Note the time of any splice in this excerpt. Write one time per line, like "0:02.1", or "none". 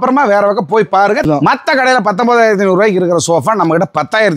0:01.2